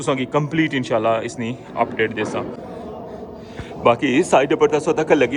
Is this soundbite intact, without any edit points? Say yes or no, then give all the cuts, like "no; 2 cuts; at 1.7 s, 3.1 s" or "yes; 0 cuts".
no; 1 cut; at 2.6 s